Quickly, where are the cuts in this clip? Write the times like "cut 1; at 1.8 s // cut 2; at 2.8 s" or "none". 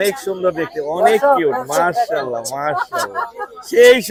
none